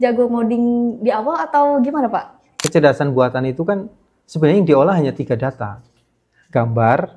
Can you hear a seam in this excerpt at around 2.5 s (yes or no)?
yes